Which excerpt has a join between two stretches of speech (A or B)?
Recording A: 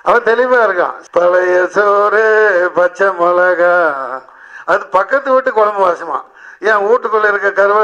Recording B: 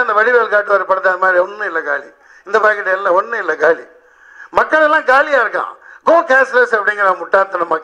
A